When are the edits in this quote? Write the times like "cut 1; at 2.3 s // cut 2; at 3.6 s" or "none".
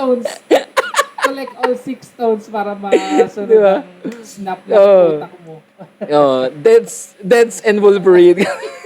none